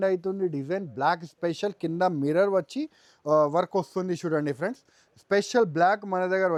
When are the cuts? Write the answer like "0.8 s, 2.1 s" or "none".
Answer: none